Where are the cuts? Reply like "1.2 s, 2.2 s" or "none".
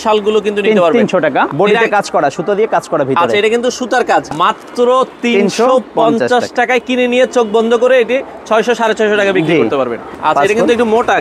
1.5 s, 4.3 s, 10.1 s